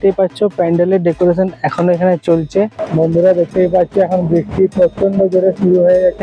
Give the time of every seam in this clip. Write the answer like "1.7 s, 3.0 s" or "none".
2.8 s